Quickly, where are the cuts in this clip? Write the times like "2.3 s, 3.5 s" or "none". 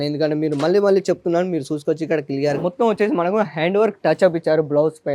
2.6 s